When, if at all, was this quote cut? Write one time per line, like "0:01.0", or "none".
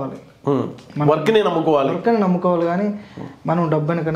none